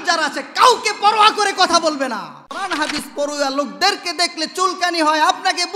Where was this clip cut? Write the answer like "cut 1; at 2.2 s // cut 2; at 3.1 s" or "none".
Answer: cut 1; at 2.7 s